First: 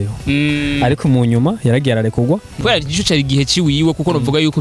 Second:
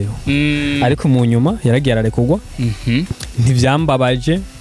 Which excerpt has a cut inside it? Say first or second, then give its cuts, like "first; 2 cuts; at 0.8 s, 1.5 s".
first; 1 cut; at 2.6 s